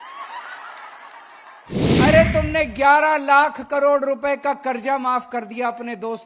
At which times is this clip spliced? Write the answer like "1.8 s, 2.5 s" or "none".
1.8 s